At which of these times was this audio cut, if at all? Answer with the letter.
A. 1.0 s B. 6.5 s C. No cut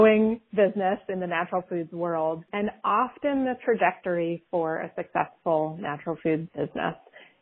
B